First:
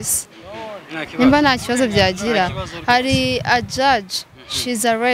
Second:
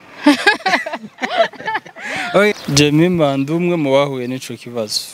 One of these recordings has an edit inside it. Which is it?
second; 1 cut; at 2.5 s

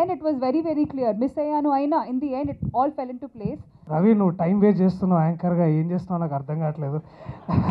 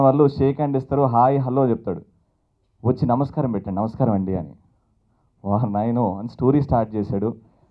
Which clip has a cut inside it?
first; 1 cut; at 3.7 s

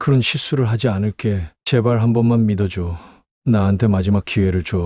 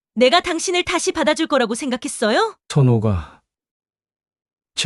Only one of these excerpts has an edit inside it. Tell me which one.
second; 1 cut; at 2.6 s

